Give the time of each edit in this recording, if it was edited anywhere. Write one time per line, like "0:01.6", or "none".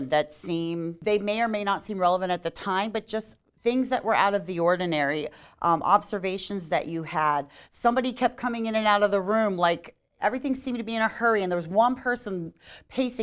0:01.0